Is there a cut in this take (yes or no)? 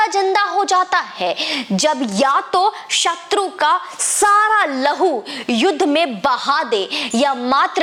no